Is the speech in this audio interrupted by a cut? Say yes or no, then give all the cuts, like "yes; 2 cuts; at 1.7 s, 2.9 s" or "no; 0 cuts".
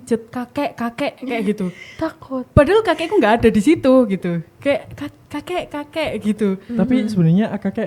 no; 0 cuts